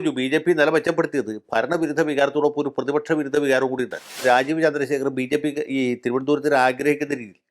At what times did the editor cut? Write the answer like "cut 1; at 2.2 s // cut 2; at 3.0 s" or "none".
cut 1; at 4.2 s